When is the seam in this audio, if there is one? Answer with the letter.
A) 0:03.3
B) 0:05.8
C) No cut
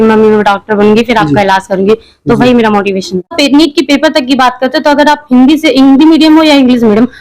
A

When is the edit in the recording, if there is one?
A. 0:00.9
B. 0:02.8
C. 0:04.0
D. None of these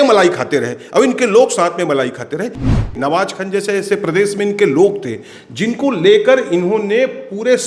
B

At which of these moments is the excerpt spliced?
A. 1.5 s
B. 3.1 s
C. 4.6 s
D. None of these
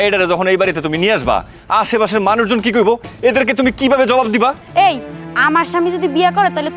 C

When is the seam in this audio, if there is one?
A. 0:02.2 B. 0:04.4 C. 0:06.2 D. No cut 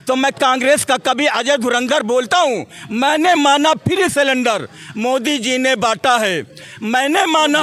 D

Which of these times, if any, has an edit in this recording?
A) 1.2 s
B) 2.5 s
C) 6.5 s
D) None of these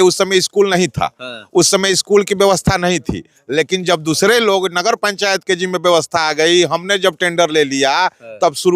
D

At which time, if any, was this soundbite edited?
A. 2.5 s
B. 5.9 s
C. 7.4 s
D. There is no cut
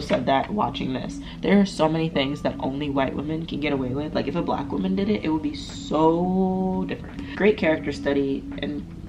D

